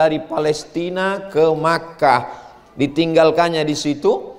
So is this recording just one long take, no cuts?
yes; 0 cuts

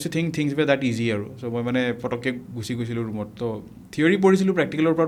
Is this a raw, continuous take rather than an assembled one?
yes; 0 cuts

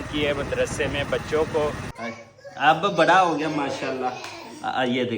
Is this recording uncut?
no; 1 cut; at 1.9 s

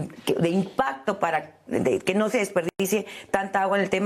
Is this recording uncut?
yes; 0 cuts

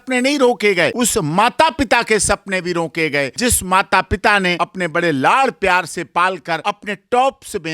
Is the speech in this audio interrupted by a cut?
yes; 4 cuts; at 0.9 s, 3.3 s, 4.5 s, 6.6 s

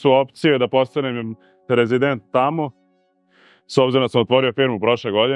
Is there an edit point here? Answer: no; 0 cuts

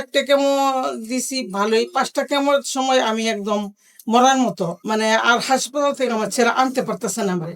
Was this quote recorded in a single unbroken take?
no; 1 cut; at 4.8 s

